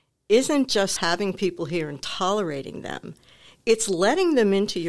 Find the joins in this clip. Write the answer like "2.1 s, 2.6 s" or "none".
none